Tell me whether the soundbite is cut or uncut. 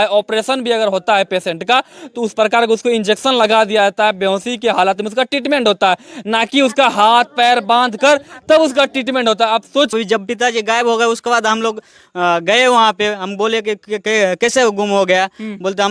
uncut